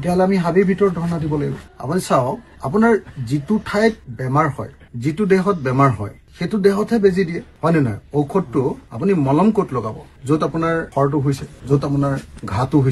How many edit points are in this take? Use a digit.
0